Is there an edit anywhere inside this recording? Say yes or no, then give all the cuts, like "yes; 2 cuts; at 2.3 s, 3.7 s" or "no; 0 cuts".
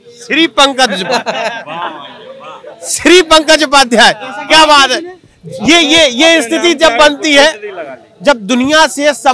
no; 0 cuts